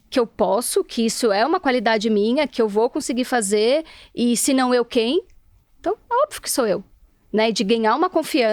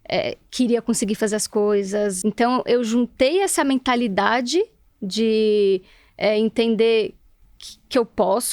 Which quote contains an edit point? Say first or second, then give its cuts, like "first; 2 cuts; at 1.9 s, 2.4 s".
second; 1 cut; at 2.2 s